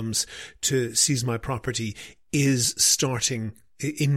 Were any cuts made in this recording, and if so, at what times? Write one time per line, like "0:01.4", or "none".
none